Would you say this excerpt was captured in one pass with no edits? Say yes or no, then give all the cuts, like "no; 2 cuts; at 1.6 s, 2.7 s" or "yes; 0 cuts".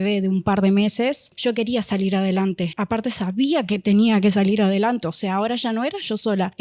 no; 1 cut; at 1.3 s